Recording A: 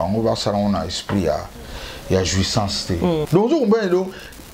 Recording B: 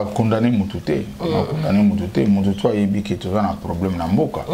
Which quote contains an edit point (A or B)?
A